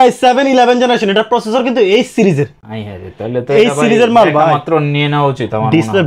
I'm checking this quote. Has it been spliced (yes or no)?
no